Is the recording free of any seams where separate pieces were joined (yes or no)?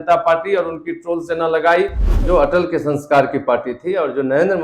no